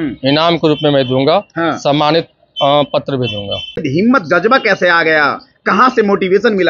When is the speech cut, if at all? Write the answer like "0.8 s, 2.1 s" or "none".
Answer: 3.9 s